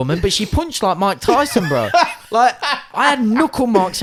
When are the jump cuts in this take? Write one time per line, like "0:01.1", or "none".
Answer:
none